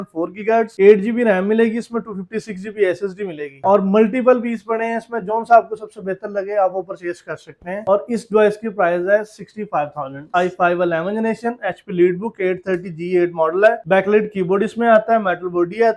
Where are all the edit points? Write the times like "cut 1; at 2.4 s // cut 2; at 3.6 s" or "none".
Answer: none